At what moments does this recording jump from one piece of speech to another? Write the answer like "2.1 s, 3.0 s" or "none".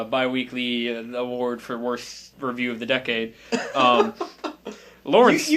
3.2 s